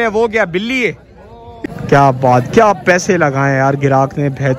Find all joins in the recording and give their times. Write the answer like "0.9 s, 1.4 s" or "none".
1.6 s